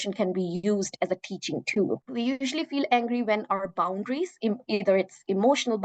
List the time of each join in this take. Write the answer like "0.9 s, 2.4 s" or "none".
2.1 s